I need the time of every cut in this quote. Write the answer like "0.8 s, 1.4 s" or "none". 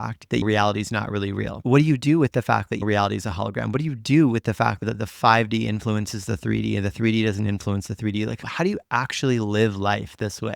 1.6 s